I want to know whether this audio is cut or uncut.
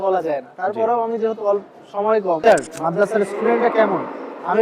cut